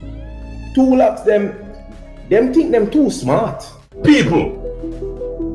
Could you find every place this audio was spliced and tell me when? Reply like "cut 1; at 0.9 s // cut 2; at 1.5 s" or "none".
cut 1; at 3.8 s